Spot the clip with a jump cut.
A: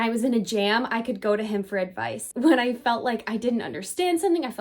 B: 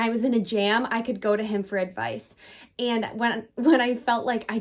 A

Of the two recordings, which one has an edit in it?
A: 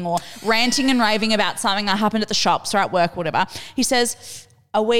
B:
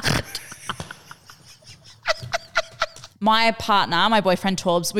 B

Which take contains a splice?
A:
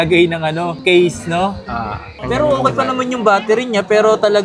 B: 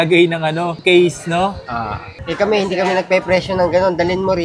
B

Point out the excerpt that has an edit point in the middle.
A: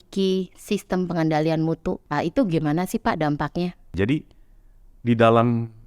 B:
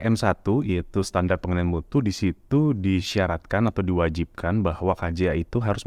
A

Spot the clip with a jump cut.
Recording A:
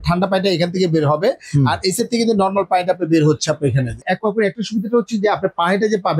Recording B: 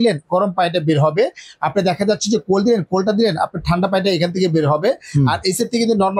A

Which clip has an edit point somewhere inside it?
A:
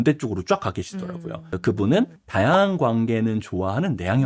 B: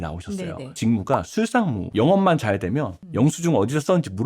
B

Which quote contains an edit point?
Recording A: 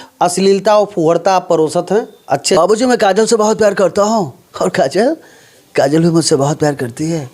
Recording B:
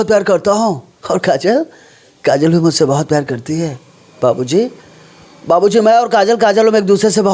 A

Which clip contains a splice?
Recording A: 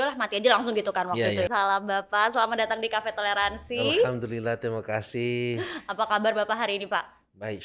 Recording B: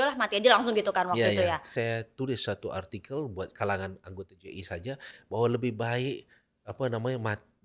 B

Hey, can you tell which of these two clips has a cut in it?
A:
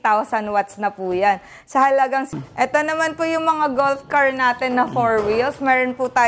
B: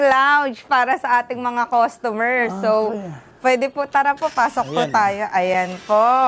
A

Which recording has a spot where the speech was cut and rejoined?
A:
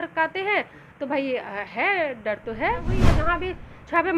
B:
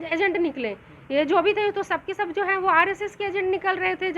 A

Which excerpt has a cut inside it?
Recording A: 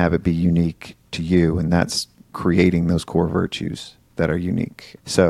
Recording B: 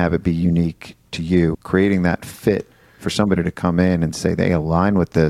B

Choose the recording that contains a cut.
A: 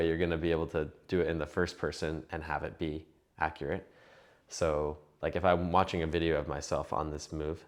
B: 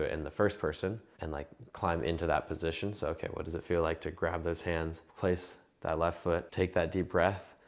B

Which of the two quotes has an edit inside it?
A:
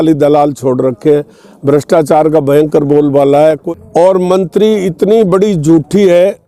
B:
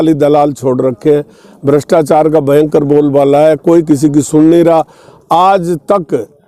A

